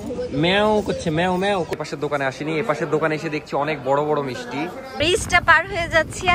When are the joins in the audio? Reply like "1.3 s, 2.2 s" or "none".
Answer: 1.7 s, 4.8 s